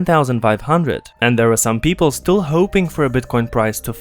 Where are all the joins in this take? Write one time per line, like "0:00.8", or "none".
0:01.1